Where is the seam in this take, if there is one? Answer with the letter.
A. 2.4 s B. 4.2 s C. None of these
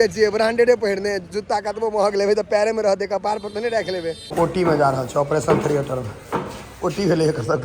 B